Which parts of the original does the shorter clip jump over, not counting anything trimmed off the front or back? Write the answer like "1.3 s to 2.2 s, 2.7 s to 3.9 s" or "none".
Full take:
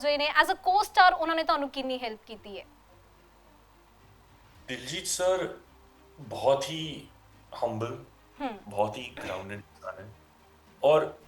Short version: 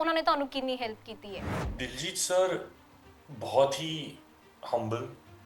2.8 s to 4.5 s